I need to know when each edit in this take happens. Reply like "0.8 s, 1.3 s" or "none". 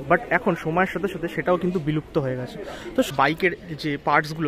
3.1 s